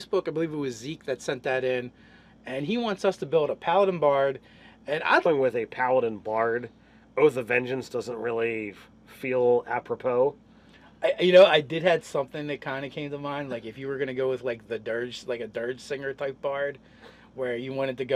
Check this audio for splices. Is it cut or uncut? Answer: uncut